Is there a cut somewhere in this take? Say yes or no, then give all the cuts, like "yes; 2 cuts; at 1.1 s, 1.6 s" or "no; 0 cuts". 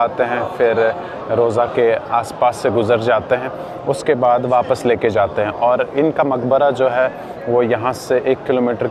no; 0 cuts